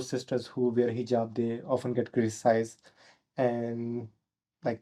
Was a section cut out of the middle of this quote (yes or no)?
no